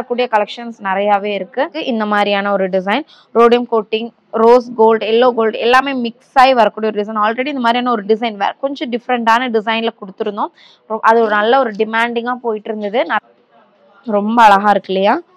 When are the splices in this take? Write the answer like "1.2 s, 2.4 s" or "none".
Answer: 1.8 s, 13.2 s